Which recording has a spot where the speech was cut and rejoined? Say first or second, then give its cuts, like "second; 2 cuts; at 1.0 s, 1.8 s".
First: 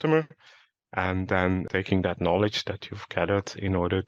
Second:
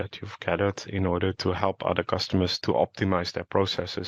first; 1 cut; at 1.7 s